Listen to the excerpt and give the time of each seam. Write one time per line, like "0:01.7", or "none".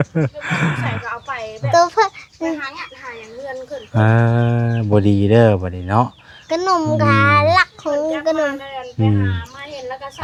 none